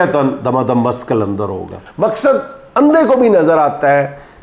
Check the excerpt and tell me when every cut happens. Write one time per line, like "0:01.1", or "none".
0:01.8

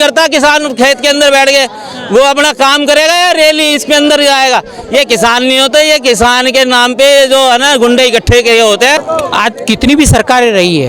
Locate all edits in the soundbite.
0:09.0

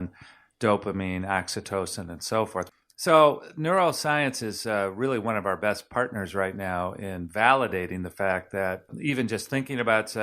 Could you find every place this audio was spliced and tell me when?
0:02.7
0:08.9

